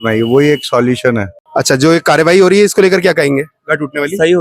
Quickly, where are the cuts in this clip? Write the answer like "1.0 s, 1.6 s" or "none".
1.4 s